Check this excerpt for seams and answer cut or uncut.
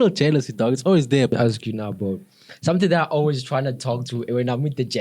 cut